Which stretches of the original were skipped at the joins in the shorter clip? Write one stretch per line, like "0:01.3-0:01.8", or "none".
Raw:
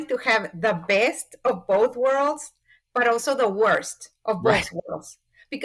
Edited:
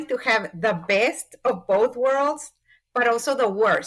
none